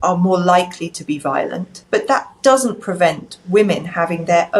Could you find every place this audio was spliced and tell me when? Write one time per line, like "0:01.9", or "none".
0:01.7

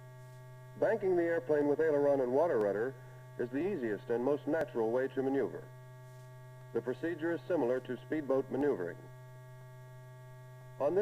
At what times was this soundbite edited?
0:04.4

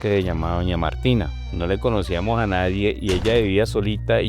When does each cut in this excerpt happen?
0:01.4

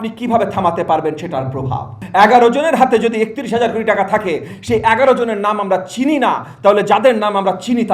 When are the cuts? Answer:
0:02.0

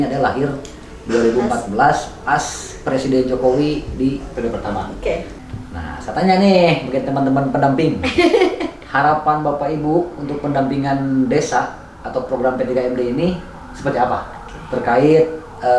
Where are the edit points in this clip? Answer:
0:05.4

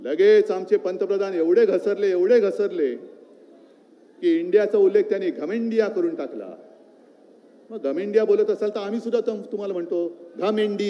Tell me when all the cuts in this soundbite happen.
none

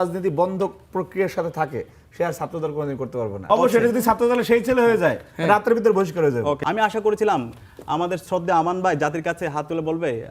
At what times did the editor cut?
0:03.4
0:06.6

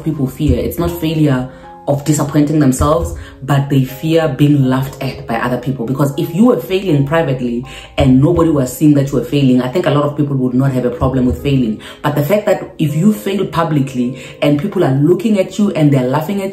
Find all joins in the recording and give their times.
none

